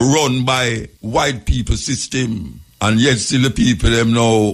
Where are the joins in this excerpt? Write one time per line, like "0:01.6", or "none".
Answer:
0:00.9
0:02.6

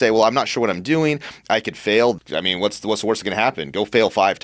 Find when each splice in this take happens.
0:02.2

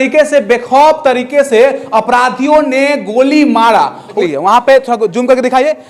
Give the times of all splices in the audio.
0:04.0

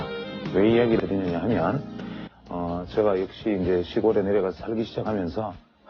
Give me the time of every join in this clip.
0:01.0

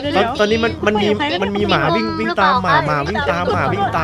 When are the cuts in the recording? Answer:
none

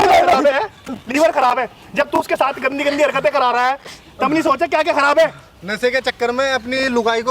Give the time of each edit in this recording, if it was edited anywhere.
none

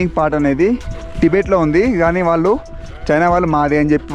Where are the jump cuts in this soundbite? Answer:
none

